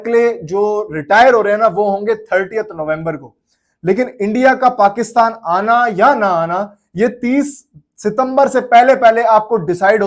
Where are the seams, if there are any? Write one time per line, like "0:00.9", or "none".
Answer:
none